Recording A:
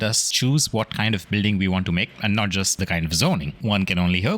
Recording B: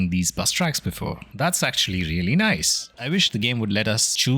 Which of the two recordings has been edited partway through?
B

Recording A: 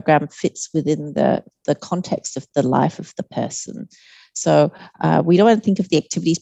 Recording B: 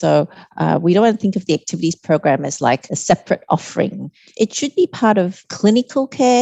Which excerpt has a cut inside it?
B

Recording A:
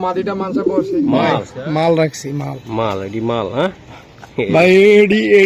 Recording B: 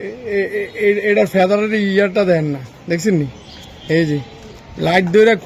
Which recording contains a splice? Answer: A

